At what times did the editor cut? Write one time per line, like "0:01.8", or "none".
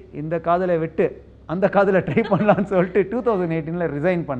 none